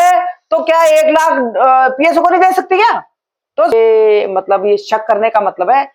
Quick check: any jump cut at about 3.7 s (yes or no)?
yes